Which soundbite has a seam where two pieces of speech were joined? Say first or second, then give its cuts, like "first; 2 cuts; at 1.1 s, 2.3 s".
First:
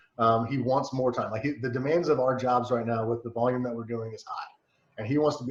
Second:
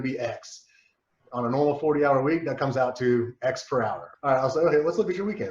second; 1 cut; at 4.0 s